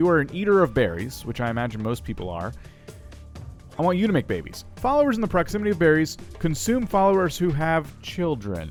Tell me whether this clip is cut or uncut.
uncut